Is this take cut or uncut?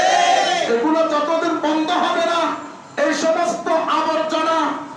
uncut